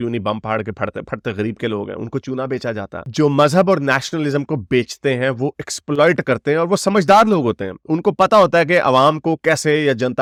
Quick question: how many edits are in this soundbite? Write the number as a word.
zero